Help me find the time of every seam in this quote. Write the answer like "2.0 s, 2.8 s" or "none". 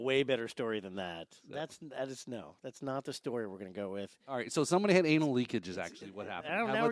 none